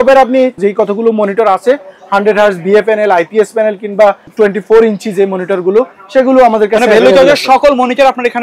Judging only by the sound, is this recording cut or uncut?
uncut